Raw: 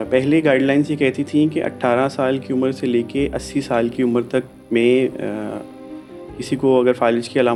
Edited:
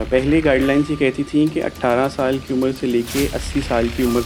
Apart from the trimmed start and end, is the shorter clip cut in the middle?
no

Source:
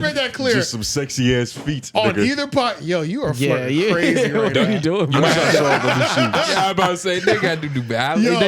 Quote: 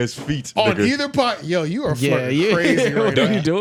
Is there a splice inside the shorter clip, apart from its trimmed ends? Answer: no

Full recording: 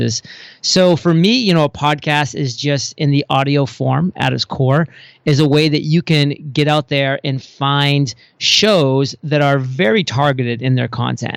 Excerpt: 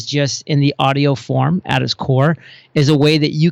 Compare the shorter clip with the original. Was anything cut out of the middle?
no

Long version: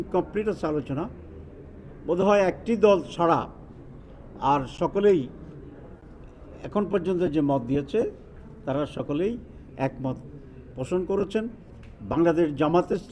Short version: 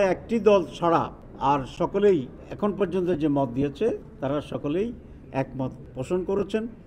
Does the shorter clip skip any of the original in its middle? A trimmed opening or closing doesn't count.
yes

